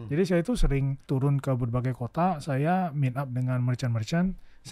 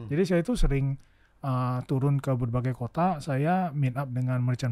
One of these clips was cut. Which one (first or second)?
first